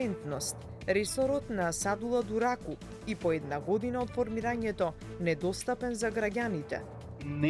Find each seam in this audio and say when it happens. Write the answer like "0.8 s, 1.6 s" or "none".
none